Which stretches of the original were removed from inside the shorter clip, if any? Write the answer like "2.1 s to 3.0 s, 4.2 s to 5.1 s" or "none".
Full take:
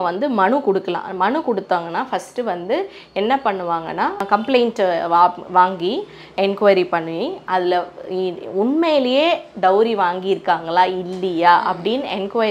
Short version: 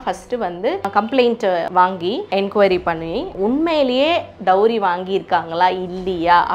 2.9 s to 4.2 s, 5.1 s to 5.8 s, 7.4 s to 8.5 s